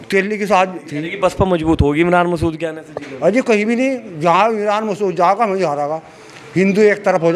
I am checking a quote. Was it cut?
yes; 1 cut; at 1.0 s

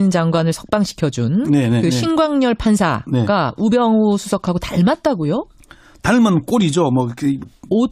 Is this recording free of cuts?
no; 1 cut; at 6.3 s

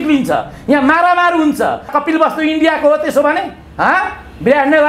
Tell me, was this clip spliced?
yes; 1 cut; at 1.9 s

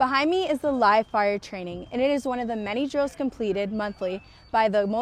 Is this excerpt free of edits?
yes; 0 cuts

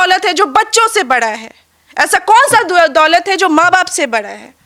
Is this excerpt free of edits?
yes; 0 cuts

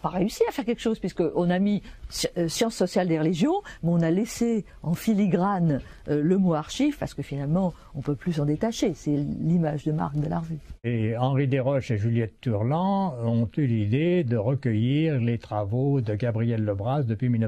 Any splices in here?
yes; 1 cut; at 3.4 s

